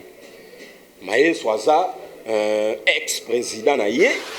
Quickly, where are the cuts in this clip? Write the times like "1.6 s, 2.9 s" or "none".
none